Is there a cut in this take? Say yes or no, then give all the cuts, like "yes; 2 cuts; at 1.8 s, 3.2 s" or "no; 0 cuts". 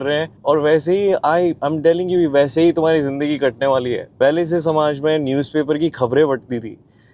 no; 0 cuts